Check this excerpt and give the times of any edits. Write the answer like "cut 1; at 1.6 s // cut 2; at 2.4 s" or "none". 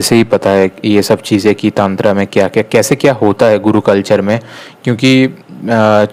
none